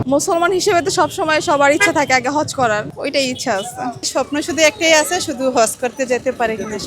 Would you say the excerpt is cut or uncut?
cut